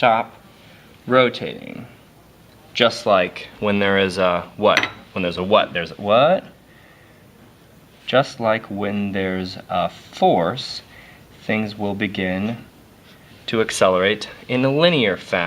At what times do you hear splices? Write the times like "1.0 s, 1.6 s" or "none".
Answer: 2.6 s